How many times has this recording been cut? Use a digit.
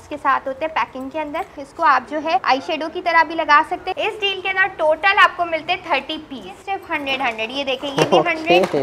4